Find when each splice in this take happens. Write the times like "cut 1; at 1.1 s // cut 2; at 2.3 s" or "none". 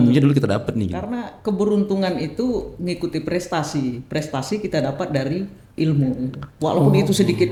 none